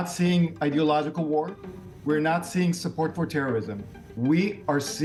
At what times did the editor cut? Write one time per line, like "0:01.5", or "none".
none